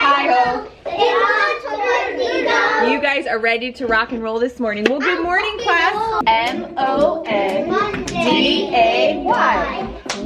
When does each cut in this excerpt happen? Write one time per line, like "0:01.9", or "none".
0:06.2